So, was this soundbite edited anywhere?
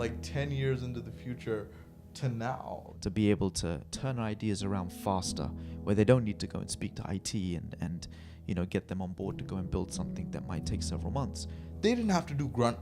yes; 2 cuts; at 2.9 s, 11.7 s

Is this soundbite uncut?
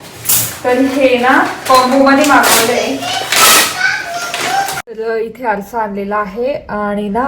no; 1 cut; at 5.0 s

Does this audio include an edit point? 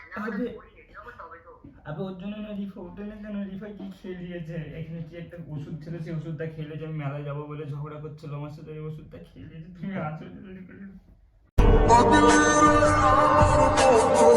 no; 0 cuts

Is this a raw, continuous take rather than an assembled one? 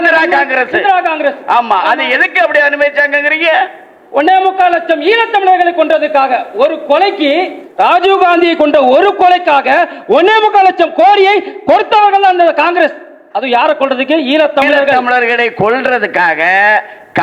no; 1 cut; at 14.9 s

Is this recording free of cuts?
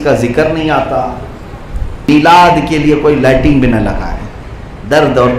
no; 1 cut; at 2.1 s

